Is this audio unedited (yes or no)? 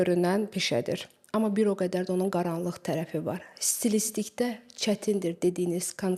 yes